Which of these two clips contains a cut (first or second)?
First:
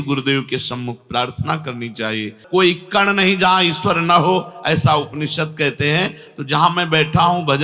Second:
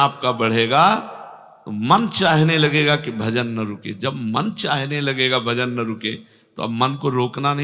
first